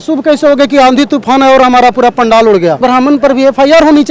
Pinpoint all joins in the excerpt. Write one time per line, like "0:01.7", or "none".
0:02.8